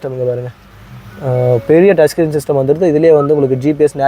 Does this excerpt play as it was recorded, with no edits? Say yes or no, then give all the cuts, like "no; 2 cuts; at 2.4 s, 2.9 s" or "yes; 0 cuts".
yes; 0 cuts